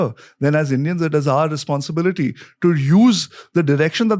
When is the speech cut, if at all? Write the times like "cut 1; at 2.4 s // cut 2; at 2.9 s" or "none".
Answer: none